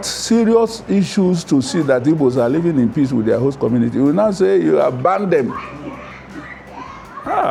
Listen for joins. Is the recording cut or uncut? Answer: uncut